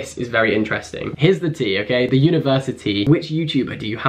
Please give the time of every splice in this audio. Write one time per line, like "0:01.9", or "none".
0:01.1
0:03.0